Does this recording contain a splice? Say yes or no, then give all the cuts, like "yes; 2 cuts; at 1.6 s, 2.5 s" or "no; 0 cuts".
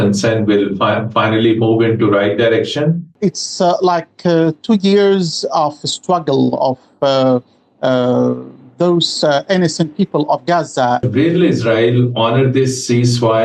yes; 2 cuts; at 3.1 s, 11.0 s